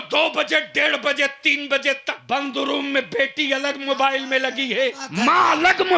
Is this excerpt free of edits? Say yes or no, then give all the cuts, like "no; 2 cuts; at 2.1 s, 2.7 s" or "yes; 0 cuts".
no; 2 cuts; at 2.1 s, 5.0 s